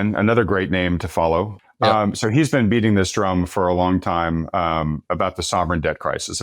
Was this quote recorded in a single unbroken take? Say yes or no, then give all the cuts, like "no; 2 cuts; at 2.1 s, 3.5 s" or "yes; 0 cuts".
no; 1 cut; at 1.6 s